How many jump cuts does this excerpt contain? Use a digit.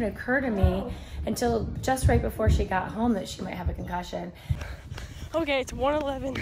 1